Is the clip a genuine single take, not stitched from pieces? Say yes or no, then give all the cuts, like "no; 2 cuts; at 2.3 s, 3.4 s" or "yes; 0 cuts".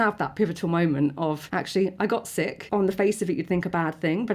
no; 2 cuts; at 1.4 s, 2.6 s